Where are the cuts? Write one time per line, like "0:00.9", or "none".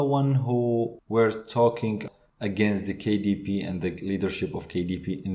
0:01.0
0:02.0